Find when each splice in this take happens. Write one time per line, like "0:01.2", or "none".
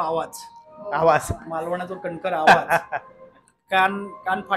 none

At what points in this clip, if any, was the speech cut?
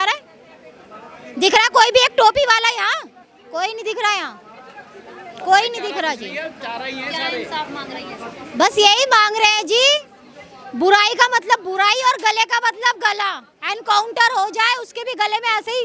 none

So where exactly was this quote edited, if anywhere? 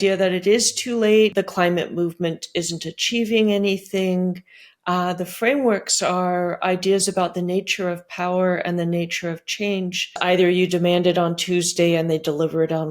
0:01.3
0:10.2

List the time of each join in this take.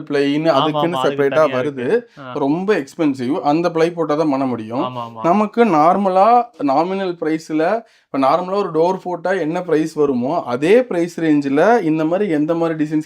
none

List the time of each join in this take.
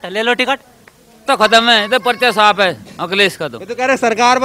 0:01.2

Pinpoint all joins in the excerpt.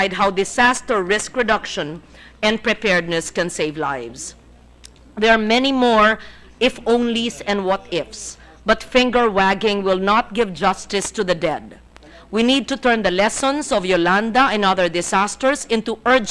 0:03.2

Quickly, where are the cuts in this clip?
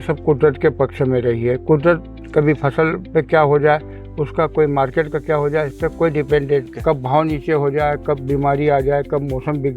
0:06.7

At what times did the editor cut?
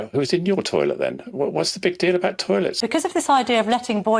0:02.8

